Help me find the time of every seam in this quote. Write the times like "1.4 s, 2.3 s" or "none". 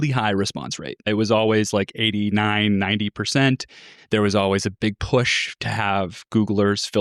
1.0 s, 4.7 s